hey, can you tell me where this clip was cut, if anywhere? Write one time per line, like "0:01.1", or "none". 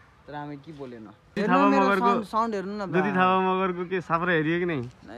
0:01.4